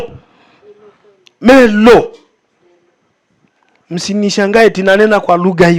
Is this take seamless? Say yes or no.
yes